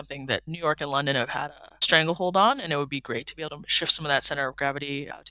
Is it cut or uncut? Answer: uncut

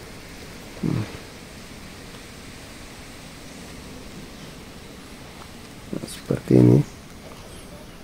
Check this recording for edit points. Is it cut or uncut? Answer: uncut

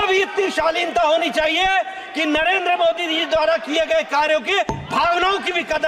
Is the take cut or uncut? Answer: uncut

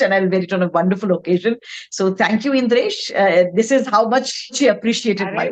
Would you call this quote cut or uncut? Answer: cut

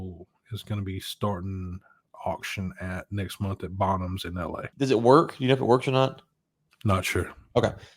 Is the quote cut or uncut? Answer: cut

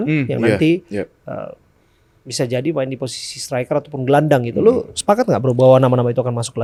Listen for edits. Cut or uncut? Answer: uncut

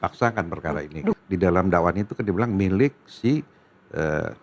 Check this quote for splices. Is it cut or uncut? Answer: cut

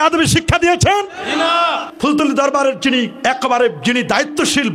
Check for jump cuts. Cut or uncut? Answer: cut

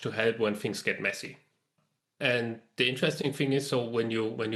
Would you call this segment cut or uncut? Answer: uncut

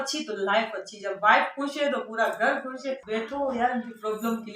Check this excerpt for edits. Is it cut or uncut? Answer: cut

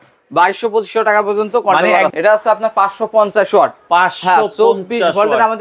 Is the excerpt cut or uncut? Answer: cut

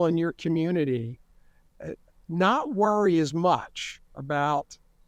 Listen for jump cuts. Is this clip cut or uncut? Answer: uncut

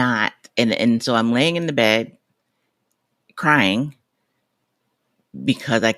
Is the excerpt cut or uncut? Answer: uncut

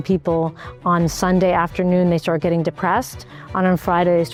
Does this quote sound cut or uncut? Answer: uncut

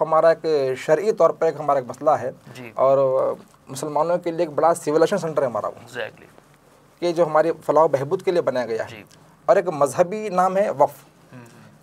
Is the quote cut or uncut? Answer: uncut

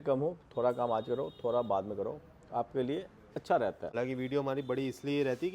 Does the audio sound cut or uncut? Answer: cut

